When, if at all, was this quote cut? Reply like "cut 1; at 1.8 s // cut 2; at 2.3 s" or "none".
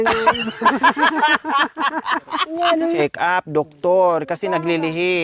cut 1; at 2.8 s